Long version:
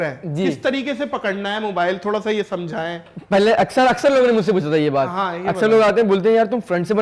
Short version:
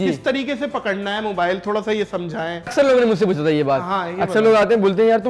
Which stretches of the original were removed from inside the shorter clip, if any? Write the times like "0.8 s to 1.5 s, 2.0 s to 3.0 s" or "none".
3.1 s to 4.0 s